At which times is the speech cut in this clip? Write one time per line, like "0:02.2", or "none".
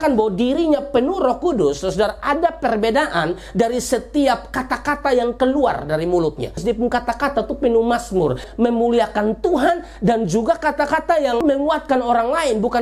0:06.6
0:08.5